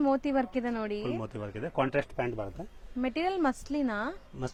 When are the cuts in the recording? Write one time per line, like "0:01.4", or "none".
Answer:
none